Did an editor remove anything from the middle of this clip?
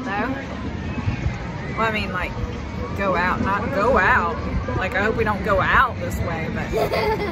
no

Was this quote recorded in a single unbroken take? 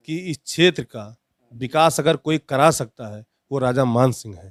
yes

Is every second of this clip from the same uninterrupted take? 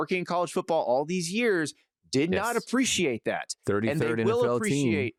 yes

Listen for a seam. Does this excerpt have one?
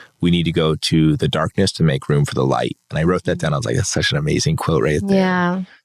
no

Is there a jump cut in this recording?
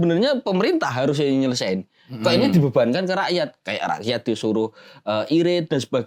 no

